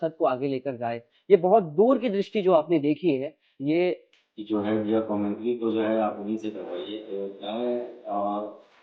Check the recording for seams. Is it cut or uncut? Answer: cut